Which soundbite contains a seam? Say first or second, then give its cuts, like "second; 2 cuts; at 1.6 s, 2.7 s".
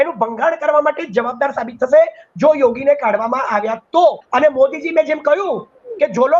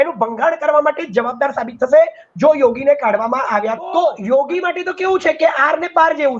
second; 1 cut; at 4.2 s